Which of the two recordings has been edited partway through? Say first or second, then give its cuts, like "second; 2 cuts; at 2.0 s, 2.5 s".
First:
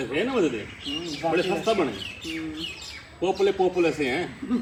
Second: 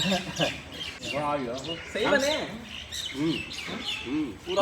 second; 1 cut; at 1.0 s